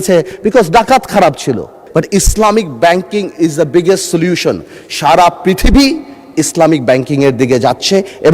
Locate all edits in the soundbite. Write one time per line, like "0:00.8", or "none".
0:01.8